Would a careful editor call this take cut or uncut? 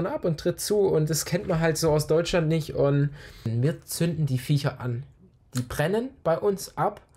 cut